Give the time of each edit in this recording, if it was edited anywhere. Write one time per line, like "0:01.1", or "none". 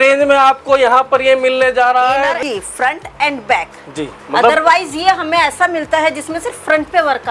0:02.4

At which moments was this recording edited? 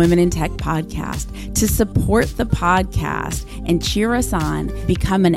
none

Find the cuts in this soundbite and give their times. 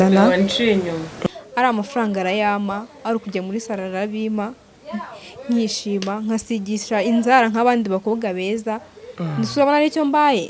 0:01.1

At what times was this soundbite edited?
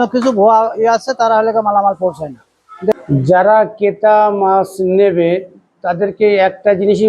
0:02.9

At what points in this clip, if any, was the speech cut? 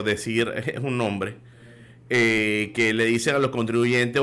none

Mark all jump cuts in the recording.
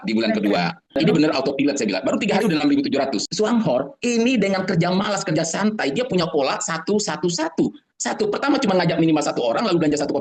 0:01.0
0:03.2

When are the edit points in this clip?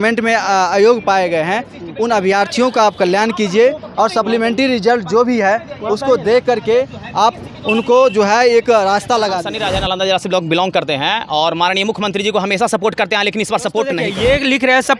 0:09.5
0:14.0

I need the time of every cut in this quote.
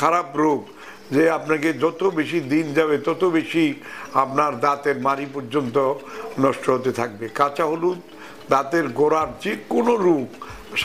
none

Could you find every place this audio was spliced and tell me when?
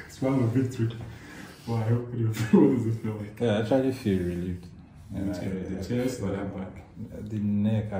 none

